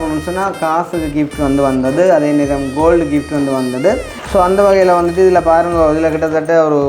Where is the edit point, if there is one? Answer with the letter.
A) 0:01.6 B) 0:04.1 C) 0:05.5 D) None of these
B